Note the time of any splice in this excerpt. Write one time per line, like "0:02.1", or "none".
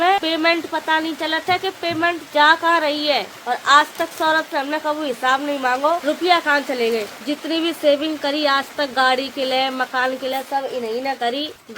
none